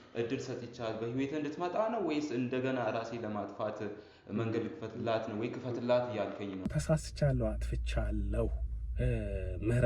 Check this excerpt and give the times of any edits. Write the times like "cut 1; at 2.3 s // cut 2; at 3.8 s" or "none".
cut 1; at 6.7 s